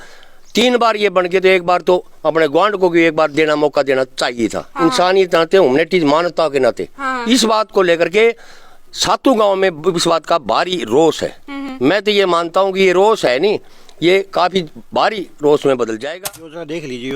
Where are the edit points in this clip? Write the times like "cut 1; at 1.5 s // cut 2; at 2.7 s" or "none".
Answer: cut 1; at 16.1 s